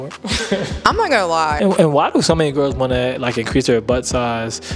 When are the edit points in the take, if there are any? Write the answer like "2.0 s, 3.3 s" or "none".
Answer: 1.6 s